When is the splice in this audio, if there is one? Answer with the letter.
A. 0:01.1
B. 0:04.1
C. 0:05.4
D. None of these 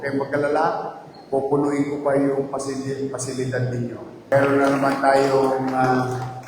B